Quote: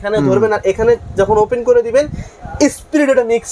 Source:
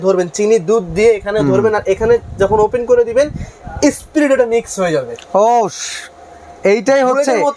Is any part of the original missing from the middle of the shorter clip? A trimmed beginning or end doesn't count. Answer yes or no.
no